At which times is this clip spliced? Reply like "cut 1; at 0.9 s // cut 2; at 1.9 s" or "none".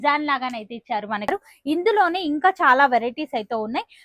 cut 1; at 1.3 s